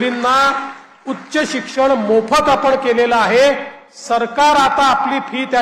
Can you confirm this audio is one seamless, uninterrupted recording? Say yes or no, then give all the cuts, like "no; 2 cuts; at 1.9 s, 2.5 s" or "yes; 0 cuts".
yes; 0 cuts